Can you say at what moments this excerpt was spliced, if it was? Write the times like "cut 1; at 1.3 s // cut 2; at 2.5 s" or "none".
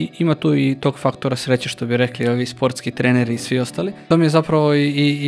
cut 1; at 3.9 s